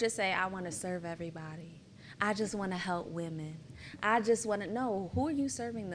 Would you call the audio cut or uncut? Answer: uncut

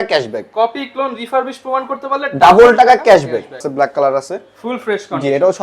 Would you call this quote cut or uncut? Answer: cut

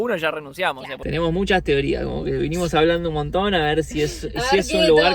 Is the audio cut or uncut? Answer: cut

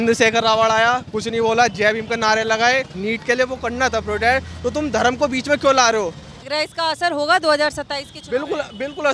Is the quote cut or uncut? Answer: cut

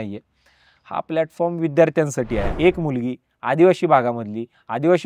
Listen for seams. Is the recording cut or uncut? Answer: cut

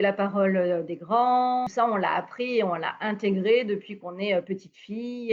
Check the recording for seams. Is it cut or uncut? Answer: cut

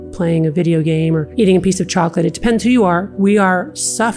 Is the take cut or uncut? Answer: cut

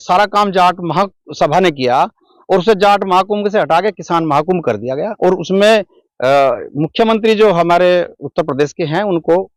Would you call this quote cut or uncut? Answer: uncut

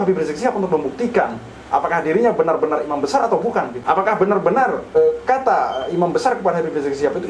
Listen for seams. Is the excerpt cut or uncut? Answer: cut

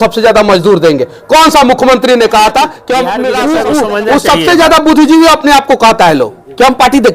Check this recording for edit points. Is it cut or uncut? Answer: cut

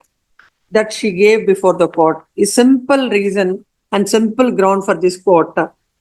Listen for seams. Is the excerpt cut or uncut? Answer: uncut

